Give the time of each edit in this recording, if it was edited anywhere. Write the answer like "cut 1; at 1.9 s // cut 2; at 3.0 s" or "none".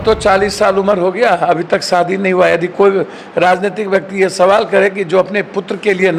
none